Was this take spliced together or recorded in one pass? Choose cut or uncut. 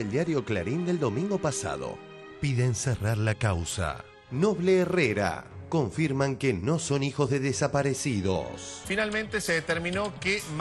cut